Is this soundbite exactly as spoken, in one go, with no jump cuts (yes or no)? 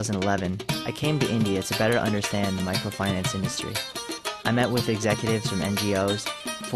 yes